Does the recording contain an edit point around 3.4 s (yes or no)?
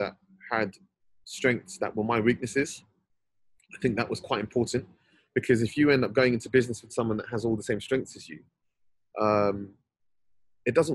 no